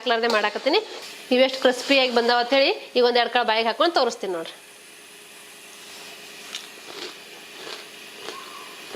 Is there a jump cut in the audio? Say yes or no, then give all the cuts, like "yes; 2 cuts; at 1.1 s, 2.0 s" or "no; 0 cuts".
yes; 1 cut; at 0.9 s